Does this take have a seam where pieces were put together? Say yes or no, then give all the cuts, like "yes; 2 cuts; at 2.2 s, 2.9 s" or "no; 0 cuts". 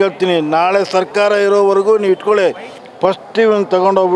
yes; 1 cut; at 2.8 s